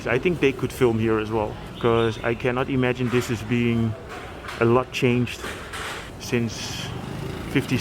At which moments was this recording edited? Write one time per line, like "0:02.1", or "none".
0:01.6
0:06.1